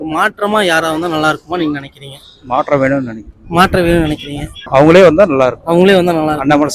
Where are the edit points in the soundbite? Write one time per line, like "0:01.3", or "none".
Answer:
0:04.5